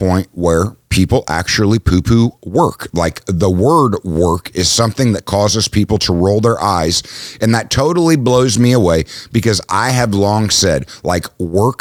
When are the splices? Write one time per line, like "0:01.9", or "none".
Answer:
none